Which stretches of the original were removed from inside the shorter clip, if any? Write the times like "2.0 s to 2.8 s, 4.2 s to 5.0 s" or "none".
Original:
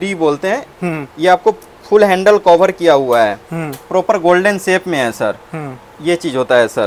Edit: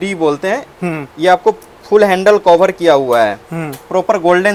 none